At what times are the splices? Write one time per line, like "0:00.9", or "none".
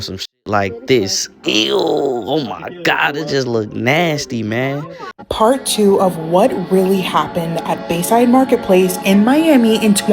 0:05.1